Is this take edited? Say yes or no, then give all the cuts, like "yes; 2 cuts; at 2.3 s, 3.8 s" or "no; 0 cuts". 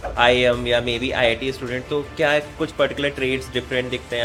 no; 0 cuts